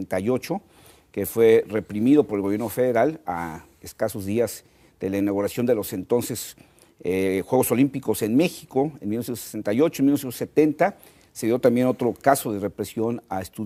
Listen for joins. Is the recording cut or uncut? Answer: uncut